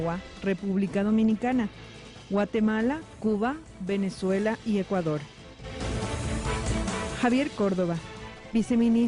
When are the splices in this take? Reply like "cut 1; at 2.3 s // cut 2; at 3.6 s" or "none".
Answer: none